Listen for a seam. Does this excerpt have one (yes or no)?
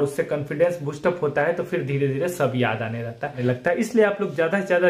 yes